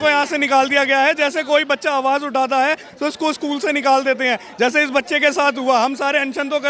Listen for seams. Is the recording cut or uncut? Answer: uncut